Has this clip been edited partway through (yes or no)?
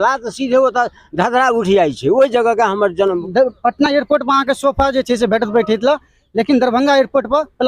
yes